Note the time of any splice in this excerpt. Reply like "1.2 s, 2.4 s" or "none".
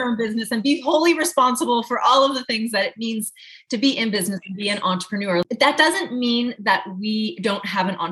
5.4 s